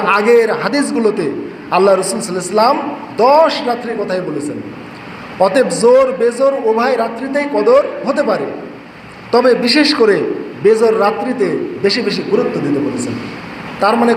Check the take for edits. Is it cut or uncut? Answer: uncut